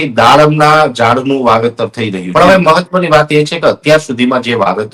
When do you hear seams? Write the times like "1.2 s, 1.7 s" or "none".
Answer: 2.2 s